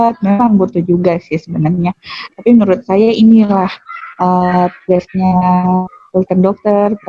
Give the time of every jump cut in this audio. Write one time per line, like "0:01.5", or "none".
none

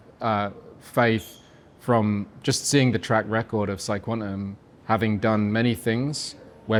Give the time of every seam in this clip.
none

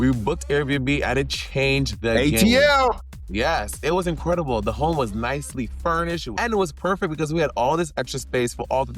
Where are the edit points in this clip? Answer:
0:06.3

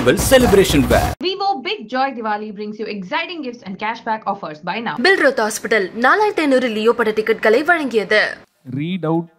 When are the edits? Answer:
0:08.4

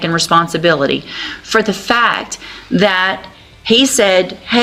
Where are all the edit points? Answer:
none

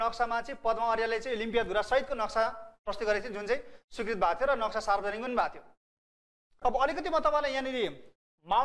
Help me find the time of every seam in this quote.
0:06.5

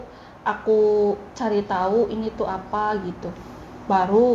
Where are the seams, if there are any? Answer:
none

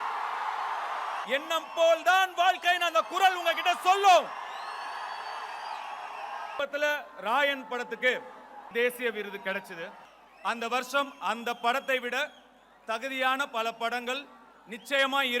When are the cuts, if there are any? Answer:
0:01.2
0:06.5
0:08.7

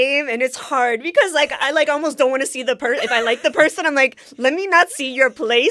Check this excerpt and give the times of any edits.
none

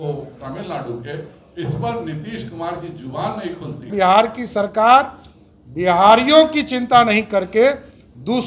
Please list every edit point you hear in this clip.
0:03.9

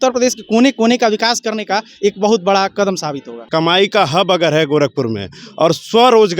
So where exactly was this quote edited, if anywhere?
0:03.5

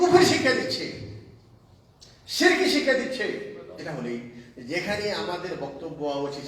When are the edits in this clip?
0:03.8

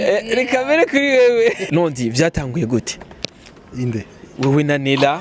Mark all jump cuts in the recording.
0:01.6

